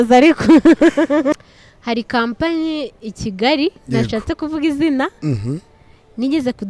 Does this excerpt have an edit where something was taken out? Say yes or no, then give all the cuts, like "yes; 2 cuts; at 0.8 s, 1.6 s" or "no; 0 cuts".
yes; 1 cut; at 1.3 s